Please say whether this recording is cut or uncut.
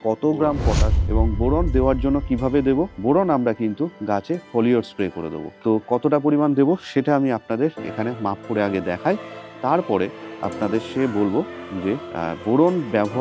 cut